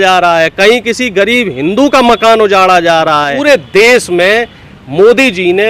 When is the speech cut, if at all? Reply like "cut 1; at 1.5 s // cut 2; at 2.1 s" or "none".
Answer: cut 1; at 3.4 s